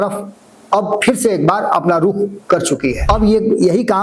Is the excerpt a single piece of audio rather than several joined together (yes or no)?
no